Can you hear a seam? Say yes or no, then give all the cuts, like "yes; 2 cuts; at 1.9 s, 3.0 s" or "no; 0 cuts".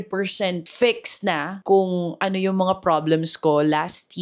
no; 0 cuts